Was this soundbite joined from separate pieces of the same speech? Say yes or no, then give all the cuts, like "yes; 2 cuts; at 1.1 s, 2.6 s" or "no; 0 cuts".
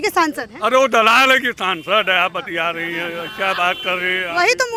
no; 0 cuts